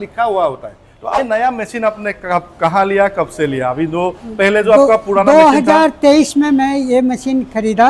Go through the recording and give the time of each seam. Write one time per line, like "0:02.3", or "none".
0:01.2